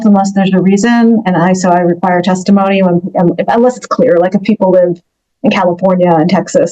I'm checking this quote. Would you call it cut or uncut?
uncut